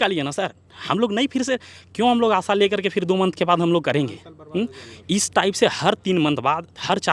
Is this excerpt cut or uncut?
uncut